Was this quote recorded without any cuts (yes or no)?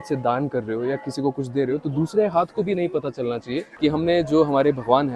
no